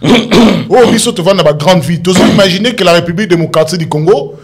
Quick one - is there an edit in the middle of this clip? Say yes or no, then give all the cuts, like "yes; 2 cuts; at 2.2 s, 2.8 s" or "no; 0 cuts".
no; 0 cuts